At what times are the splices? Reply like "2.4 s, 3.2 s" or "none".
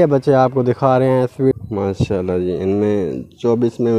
1.5 s